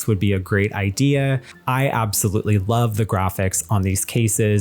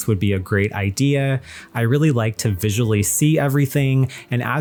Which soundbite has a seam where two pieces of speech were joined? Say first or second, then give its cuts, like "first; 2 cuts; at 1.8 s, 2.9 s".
first; 1 cut; at 1.5 s